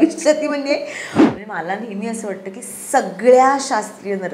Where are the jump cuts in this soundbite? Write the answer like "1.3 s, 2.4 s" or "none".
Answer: 1.2 s